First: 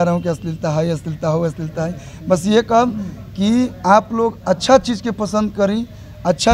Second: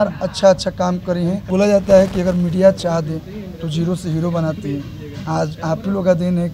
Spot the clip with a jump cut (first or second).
second